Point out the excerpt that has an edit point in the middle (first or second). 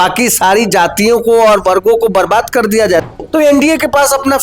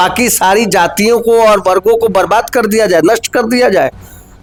first